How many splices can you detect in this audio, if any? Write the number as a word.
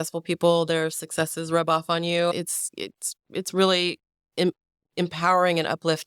zero